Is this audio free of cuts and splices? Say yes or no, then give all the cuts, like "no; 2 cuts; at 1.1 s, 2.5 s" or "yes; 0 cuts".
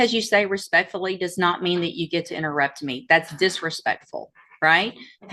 yes; 0 cuts